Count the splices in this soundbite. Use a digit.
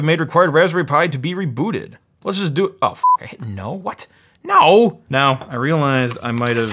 1